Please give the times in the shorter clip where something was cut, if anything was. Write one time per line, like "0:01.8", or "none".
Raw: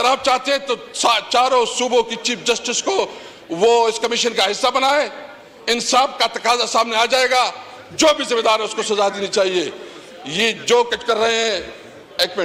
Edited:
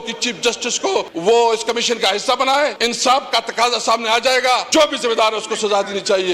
0:01.1
0:02.8
0:04.6